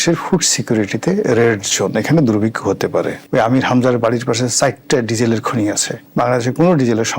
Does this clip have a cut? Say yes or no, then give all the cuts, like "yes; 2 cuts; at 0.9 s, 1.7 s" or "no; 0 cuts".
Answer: yes; 2 cuts; at 3.2 s, 6.0 s